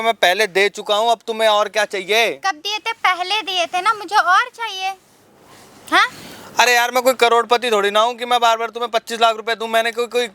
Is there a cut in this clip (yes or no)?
no